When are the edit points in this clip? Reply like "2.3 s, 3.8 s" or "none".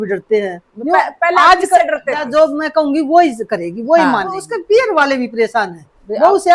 2.2 s, 4.4 s